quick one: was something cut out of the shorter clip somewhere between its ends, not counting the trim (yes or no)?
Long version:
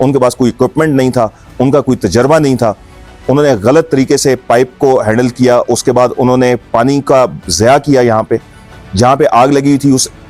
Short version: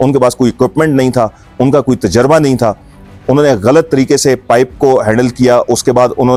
no